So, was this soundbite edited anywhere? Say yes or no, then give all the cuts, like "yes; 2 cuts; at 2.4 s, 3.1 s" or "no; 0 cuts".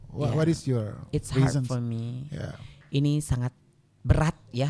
no; 0 cuts